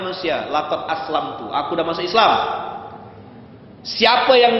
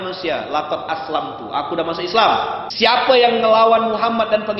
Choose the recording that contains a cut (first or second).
second